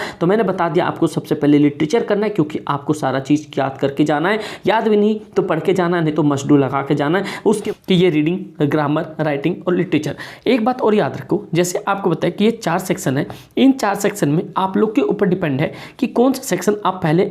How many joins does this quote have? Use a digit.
1